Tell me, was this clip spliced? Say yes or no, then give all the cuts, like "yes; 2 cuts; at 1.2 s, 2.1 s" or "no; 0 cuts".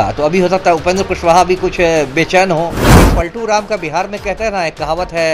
yes; 1 cut; at 3.0 s